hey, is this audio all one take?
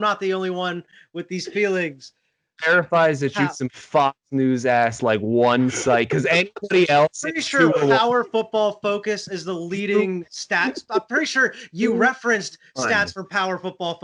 yes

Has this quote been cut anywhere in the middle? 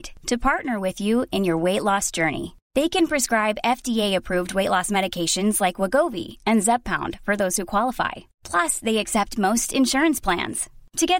no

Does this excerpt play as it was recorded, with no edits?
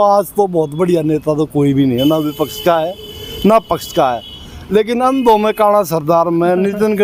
yes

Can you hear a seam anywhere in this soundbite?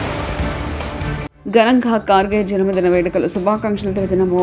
yes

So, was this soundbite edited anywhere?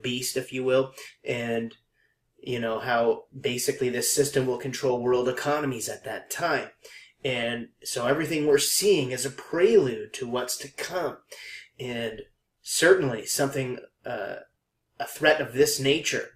yes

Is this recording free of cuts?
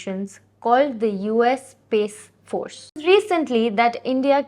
no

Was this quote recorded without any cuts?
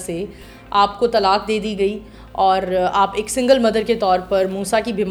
yes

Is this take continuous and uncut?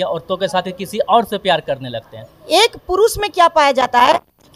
no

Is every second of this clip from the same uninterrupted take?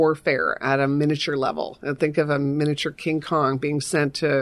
yes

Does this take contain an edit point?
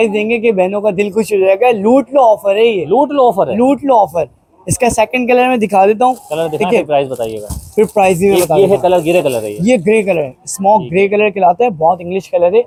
no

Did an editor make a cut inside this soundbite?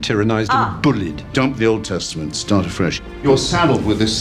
yes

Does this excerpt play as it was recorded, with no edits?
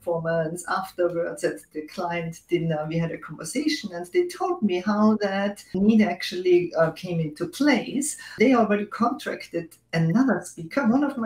no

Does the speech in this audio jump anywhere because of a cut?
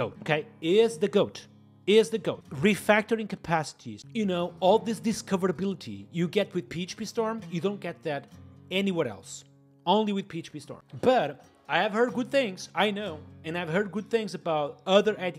no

